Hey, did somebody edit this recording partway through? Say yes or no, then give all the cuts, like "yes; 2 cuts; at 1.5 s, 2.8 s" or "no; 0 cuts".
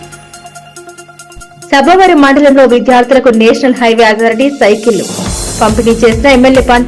no; 0 cuts